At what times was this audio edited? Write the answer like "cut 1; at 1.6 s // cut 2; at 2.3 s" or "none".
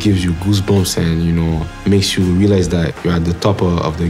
cut 1; at 1.7 s

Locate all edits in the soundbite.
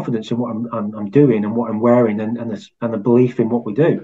none

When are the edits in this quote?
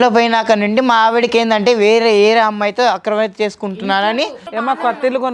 cut 1; at 4.4 s

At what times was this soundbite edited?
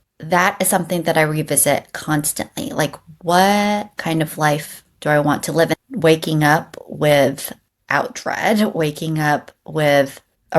cut 1; at 5.7 s

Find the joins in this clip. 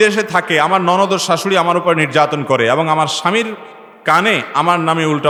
none

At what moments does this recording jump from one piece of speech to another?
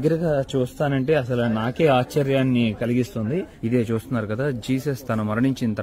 cut 1; at 3.5 s

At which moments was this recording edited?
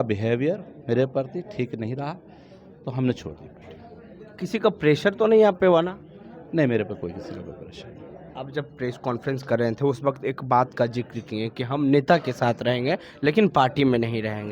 none

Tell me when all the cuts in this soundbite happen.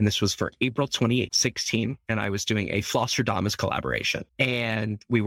cut 1; at 1.3 s // cut 2; at 4.2 s

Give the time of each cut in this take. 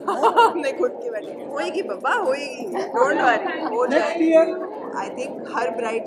cut 1; at 1.3 s // cut 2; at 4.7 s

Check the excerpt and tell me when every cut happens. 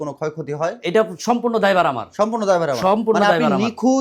none

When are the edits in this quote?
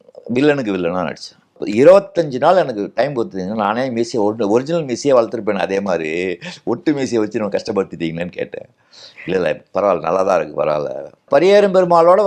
cut 1; at 1.6 s // cut 2; at 11.2 s

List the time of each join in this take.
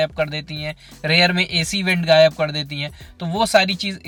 none

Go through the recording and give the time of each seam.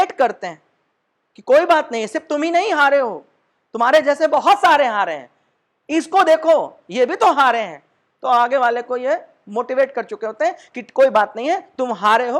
none

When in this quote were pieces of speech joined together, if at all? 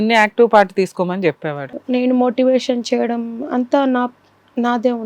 cut 1; at 1.6 s

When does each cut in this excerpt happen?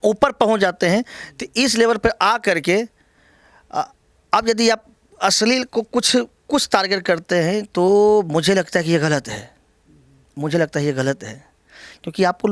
none

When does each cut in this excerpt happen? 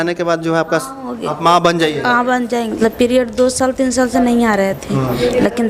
cut 1; at 2.8 s

